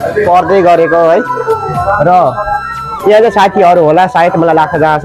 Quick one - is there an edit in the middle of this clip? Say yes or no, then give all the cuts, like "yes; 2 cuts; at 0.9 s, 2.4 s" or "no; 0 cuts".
no; 0 cuts